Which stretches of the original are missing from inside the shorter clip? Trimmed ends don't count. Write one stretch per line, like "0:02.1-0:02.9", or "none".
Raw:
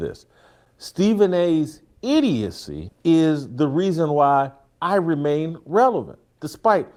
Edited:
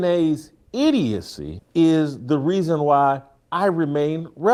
none